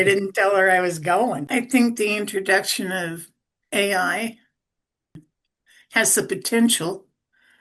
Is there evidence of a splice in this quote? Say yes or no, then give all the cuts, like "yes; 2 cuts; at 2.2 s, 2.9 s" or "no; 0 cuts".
yes; 1 cut; at 1.4 s